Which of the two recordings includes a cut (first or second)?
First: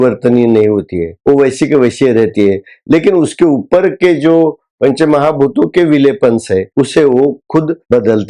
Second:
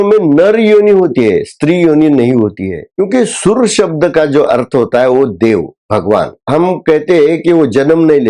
second